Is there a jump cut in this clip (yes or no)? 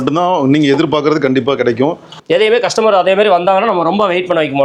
yes